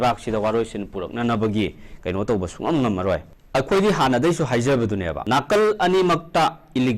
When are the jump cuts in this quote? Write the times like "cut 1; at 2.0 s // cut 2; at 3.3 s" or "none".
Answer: cut 1; at 3.3 s // cut 2; at 5.1 s